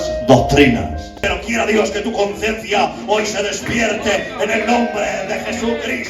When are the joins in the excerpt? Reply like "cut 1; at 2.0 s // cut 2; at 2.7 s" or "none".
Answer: cut 1; at 1.2 s